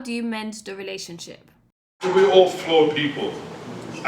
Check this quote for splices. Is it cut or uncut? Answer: cut